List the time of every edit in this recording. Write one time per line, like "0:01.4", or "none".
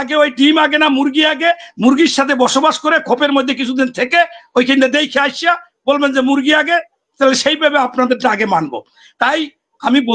none